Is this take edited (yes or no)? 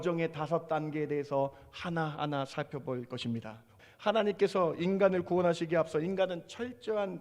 yes